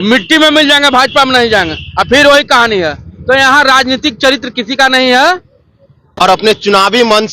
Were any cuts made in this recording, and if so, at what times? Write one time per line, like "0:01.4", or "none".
0:06.0